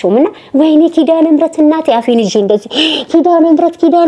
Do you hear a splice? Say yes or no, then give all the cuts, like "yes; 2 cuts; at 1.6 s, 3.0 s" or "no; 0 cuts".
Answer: no; 0 cuts